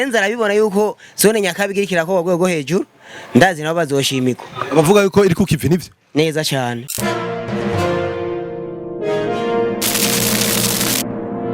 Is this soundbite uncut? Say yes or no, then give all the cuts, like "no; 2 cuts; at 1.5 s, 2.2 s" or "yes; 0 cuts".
yes; 0 cuts